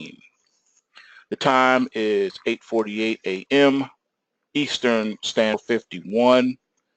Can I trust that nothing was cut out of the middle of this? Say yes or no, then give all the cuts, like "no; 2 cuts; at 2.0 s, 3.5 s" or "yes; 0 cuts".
yes; 0 cuts